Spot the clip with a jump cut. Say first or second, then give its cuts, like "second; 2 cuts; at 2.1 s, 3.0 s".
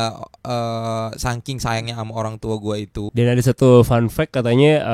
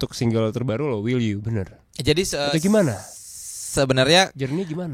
first; 1 cut; at 3.1 s